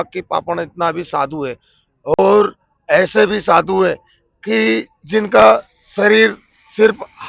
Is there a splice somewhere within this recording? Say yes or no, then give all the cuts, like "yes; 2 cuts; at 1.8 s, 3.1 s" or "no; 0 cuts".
no; 0 cuts